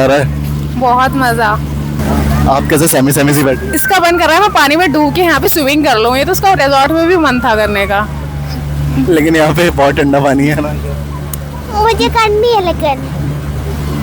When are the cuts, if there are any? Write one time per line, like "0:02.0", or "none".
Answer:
none

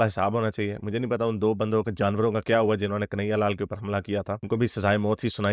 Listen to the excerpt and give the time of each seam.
none

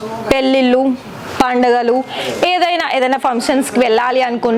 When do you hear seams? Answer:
none

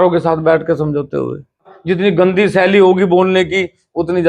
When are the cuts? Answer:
0:01.7

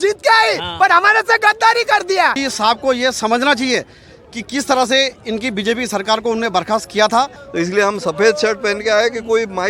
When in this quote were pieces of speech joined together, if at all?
0:02.4
0:07.4

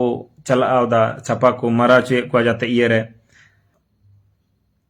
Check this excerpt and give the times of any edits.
0:03.7

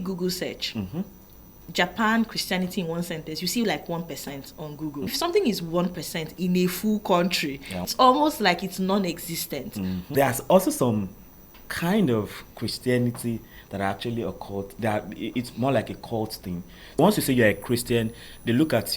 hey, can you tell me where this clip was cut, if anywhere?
0:05.1
0:07.9
0:10.0
0:17.0

